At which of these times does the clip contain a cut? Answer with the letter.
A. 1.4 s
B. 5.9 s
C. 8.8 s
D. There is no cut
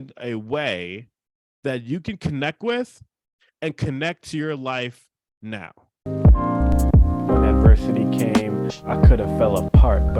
B